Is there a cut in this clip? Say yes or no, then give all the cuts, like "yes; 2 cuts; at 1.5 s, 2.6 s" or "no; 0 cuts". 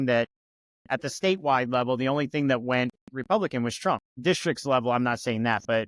no; 0 cuts